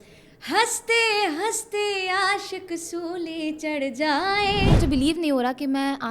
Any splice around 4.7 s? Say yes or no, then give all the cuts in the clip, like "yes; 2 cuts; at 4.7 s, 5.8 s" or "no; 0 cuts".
yes; 1 cut; at 4.7 s